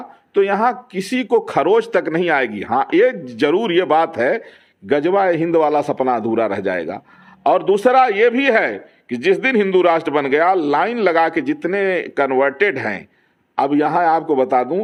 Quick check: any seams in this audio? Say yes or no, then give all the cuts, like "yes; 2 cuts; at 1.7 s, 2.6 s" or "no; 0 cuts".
no; 0 cuts